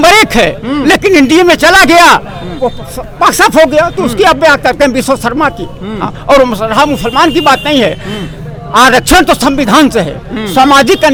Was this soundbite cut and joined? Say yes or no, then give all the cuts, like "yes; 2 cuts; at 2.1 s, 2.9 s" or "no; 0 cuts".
no; 0 cuts